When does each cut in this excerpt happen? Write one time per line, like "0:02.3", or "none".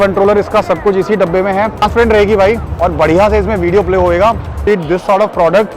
0:01.8
0:04.7